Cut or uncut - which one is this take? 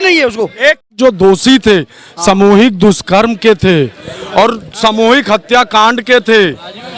cut